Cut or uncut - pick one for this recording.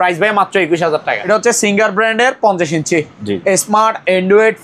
cut